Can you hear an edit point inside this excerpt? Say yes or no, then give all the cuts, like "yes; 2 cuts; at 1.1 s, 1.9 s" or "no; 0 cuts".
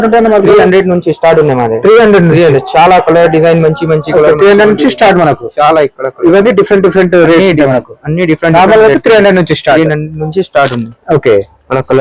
no; 0 cuts